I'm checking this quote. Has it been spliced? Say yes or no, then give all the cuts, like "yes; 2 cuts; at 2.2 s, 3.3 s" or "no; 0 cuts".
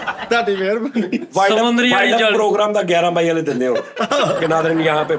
yes; 1 cut; at 1.2 s